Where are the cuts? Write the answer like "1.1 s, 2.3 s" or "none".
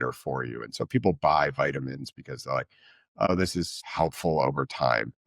3.3 s